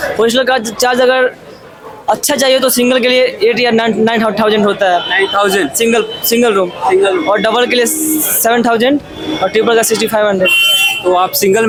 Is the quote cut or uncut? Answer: uncut